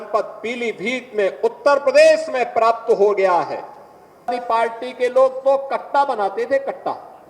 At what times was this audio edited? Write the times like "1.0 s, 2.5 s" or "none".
4.3 s